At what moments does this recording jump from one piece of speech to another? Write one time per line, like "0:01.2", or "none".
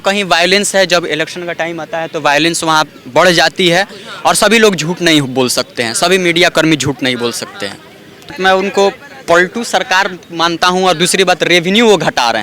0:08.3